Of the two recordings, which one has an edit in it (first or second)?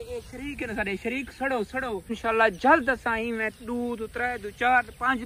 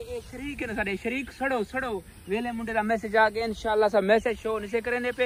first